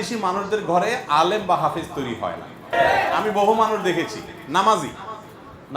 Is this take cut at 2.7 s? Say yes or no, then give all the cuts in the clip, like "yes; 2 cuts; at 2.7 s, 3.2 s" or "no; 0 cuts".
yes; 1 cut; at 2.7 s